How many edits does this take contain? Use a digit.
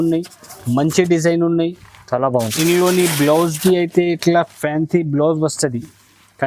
0